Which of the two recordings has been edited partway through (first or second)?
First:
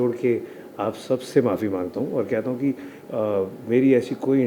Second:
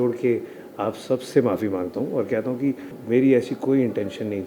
second